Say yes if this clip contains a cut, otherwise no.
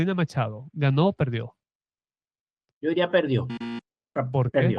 no